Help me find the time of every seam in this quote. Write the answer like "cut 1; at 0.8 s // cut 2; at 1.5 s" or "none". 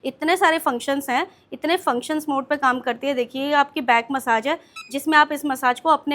none